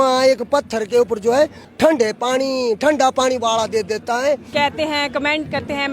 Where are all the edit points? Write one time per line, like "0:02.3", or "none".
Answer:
0:01.6
0:04.5